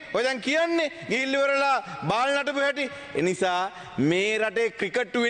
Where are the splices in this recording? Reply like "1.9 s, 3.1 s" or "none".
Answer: none